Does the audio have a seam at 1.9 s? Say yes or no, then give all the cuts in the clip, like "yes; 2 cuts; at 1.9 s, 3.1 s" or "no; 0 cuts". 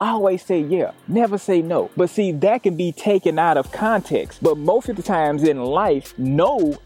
yes; 2 cuts; at 1.9 s, 4.3 s